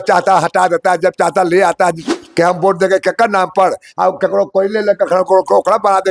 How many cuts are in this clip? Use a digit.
1